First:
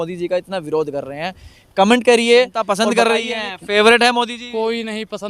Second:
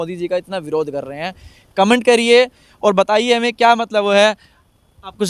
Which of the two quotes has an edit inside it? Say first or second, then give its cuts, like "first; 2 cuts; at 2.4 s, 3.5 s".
first; 1 cut; at 2.7 s